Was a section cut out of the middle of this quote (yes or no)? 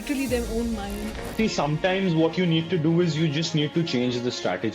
yes